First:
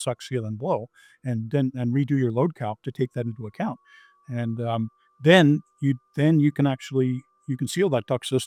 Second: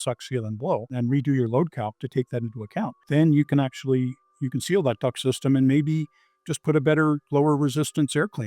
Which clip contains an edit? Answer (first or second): second